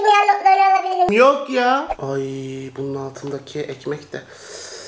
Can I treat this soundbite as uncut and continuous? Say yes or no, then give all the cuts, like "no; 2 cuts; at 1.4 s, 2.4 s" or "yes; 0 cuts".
no; 1 cut; at 2.0 s